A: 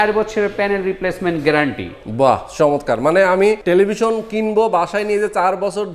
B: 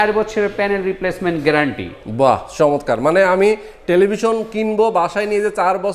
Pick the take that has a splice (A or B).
A